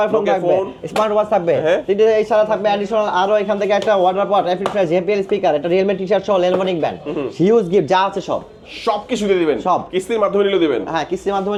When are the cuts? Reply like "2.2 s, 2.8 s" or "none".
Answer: none